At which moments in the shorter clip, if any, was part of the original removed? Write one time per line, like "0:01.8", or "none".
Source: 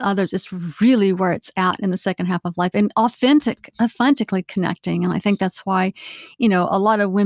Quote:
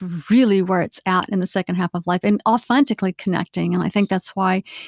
0:02.6